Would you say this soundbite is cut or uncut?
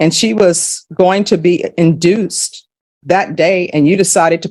uncut